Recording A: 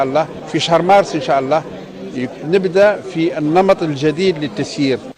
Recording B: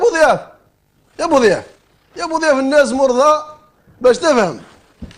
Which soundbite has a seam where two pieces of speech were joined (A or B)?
A